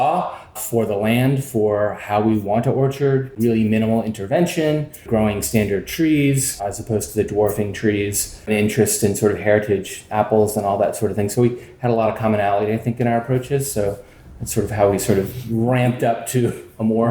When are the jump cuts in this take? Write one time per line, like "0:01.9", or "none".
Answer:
0:03.3
0:05.1
0:08.5